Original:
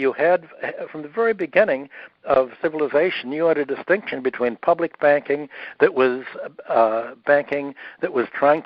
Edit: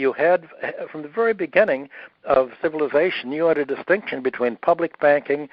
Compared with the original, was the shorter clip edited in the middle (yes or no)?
no